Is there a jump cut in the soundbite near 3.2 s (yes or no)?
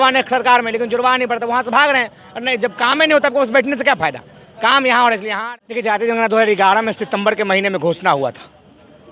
no